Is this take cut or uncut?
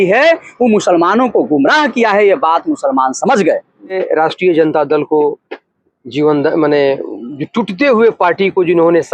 cut